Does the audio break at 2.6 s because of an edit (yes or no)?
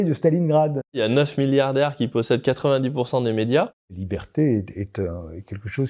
no